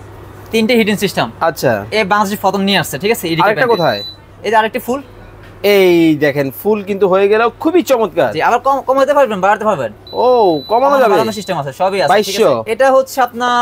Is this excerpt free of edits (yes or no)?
no